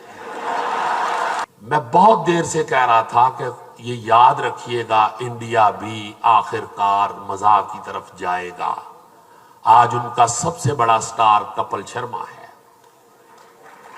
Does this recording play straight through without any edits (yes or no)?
no